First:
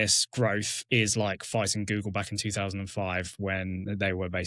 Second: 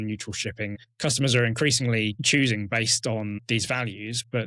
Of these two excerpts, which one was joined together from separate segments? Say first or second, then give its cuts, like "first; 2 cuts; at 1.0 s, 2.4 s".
second; 3 cuts; at 0.8 s, 2.2 s, 3.4 s